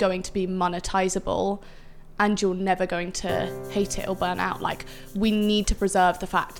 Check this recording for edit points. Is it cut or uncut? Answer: cut